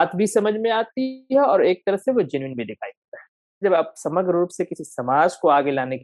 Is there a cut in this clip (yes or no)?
yes